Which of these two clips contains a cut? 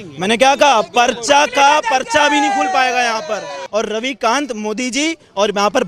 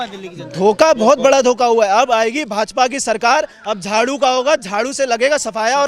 first; 1 cut; at 3.6 s

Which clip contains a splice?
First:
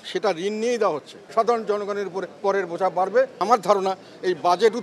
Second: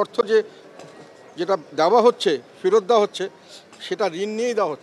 first; 1 cut; at 3.3 s

